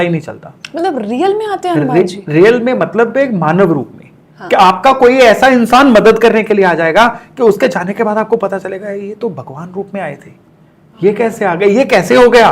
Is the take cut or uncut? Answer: uncut